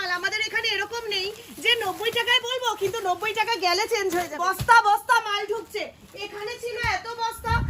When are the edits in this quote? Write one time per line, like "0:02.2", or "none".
0:04.3